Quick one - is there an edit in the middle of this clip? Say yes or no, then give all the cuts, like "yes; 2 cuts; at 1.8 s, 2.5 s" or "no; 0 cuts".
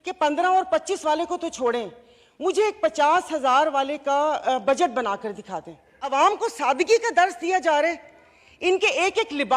yes; 1 cut; at 6.1 s